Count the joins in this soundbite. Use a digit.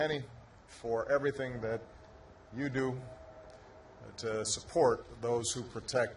1